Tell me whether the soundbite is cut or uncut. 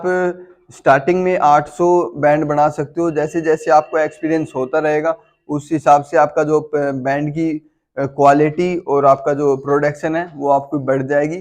uncut